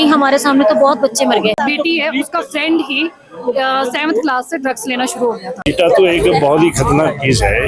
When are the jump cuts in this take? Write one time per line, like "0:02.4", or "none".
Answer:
0:01.6
0:05.5

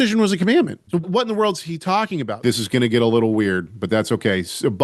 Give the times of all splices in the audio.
0:01.1
0:02.3

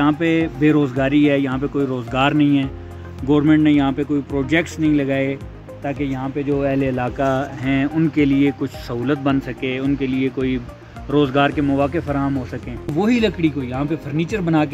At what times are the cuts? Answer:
0:12.9

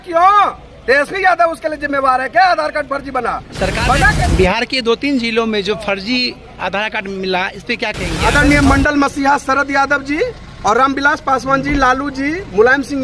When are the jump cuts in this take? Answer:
0:04.2
0:08.2

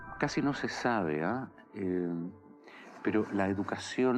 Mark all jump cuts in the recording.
0:02.7

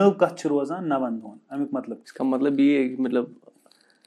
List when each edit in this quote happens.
0:02.0

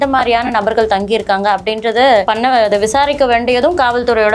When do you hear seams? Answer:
0:02.2

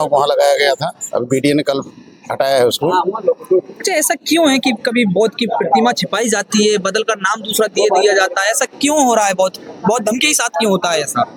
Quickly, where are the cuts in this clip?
none

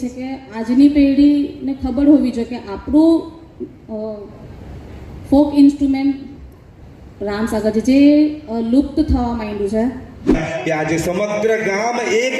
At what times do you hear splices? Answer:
0:10.3

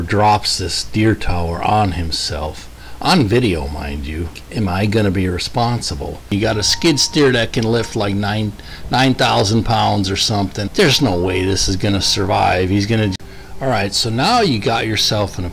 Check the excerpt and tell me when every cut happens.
0:04.4
0:06.3
0:10.6
0:13.1

